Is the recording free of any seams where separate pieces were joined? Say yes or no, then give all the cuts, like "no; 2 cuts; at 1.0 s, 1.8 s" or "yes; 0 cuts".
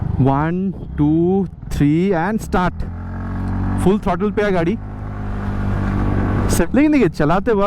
no; 1 cut; at 6.7 s